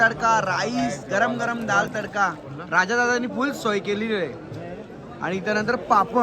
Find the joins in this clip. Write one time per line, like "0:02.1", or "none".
none